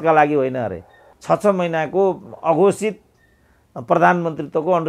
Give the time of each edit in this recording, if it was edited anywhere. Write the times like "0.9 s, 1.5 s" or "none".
1.1 s